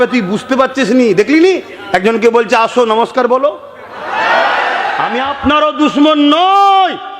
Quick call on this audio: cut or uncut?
cut